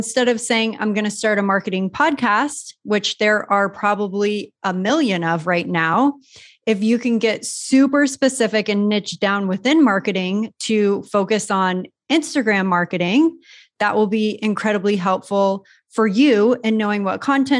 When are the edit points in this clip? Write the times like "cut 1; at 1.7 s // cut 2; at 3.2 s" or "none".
none